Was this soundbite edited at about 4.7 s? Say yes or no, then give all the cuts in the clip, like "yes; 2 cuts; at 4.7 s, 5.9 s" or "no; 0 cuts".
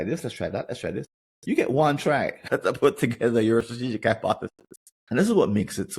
no; 1 cut; at 2.5 s